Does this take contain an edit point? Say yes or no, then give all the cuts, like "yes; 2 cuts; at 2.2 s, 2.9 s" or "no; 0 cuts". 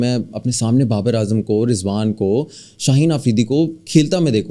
no; 0 cuts